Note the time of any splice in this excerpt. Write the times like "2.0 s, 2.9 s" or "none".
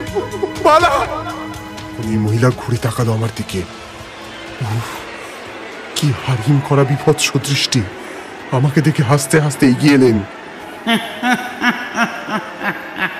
none